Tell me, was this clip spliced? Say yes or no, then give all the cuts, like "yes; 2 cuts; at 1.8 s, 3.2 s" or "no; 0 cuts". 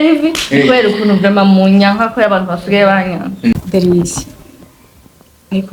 yes; 1 cut; at 3.5 s